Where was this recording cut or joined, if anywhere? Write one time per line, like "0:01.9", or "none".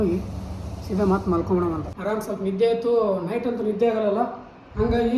0:01.9